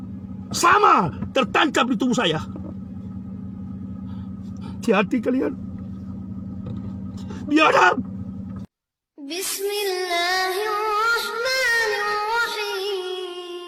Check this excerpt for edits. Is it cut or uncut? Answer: uncut